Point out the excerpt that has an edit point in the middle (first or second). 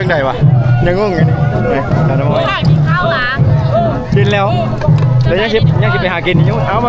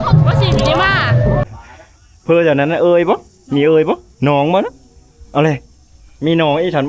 second